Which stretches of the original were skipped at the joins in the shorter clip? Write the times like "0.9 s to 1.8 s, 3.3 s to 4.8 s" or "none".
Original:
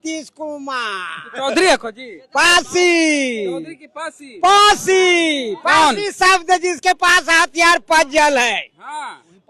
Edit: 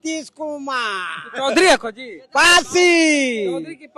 none